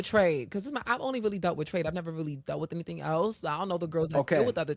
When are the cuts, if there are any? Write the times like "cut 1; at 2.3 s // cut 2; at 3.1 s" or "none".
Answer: none